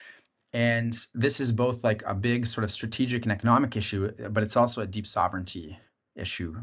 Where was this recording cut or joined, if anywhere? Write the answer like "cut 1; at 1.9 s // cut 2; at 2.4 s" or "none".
none